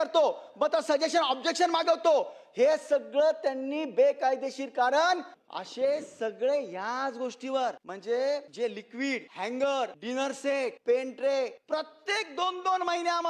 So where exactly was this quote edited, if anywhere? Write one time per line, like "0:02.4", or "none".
0:05.4
0:07.9
0:08.8
0:10.4
0:11.6